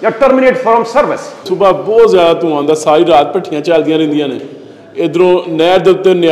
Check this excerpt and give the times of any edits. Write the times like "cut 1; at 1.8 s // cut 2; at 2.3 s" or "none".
cut 1; at 1.5 s